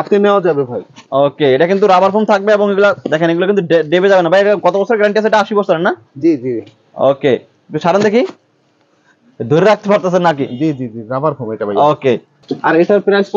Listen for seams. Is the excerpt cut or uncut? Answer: uncut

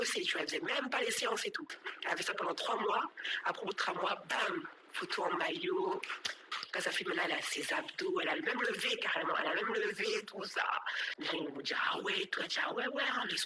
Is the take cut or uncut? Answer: uncut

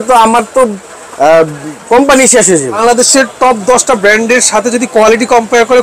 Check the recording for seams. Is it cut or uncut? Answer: cut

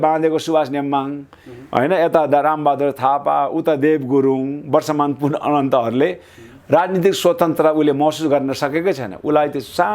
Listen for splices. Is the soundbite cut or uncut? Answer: uncut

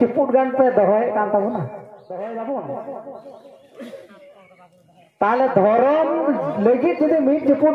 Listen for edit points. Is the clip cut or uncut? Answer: cut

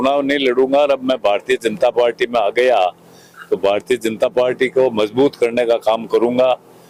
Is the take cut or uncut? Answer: uncut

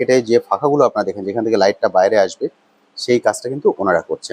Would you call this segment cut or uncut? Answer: uncut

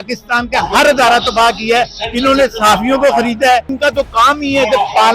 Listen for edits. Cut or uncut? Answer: cut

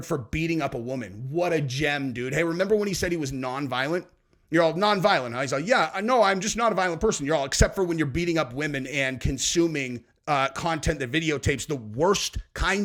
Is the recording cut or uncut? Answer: uncut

